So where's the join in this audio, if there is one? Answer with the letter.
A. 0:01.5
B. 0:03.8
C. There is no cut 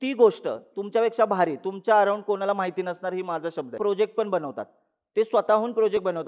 B